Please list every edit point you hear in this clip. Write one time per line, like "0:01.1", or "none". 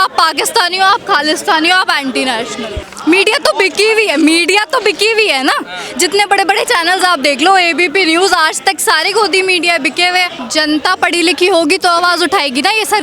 0:02.8
0:10.4